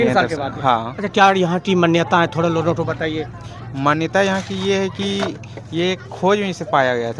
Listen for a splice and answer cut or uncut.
uncut